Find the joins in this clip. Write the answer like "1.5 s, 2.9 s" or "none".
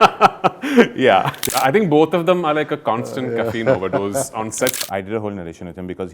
1.4 s, 4.8 s

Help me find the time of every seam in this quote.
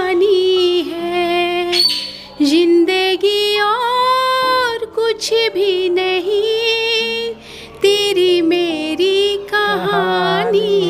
none

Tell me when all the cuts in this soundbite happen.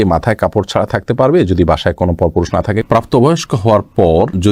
2.8 s

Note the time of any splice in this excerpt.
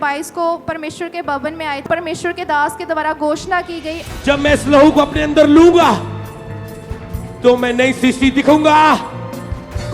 1.9 s, 4.0 s

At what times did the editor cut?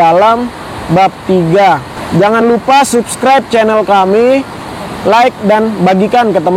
2.4 s

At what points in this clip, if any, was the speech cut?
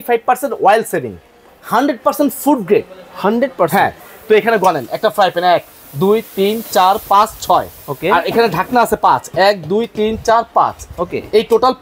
4.0 s

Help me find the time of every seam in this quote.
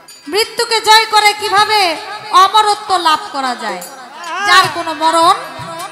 none

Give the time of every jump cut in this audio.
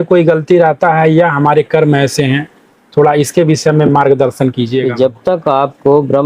4.9 s

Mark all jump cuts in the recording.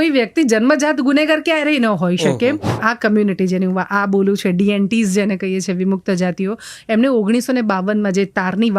2.8 s

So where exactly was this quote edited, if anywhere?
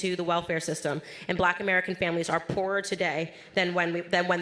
none

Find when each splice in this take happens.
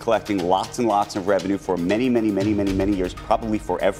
none

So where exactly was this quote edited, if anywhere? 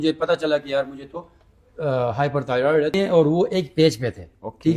2.9 s

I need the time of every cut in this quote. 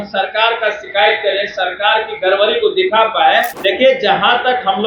3.5 s

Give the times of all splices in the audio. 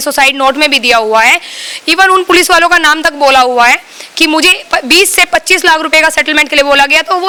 none

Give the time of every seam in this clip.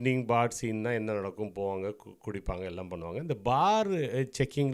none

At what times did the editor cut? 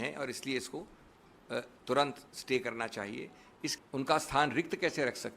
3.7 s

